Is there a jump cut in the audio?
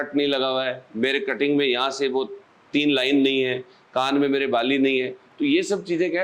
no; 0 cuts

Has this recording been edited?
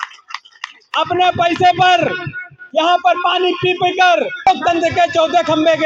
yes; 1 cut; at 4.3 s

